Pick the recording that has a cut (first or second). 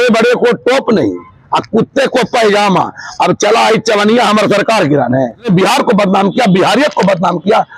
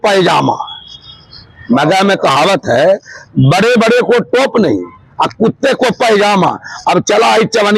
first